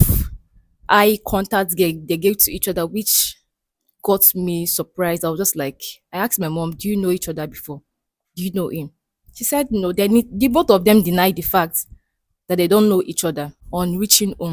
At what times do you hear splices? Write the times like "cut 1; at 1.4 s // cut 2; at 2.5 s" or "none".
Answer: cut 1; at 13.6 s